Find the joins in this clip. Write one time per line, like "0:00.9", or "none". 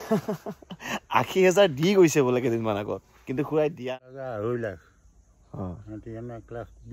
0:03.8